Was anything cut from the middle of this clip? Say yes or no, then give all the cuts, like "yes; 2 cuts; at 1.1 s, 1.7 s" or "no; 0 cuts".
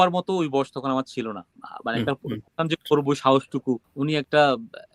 no; 0 cuts